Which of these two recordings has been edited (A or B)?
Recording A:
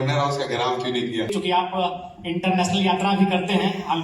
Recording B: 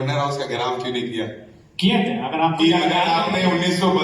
A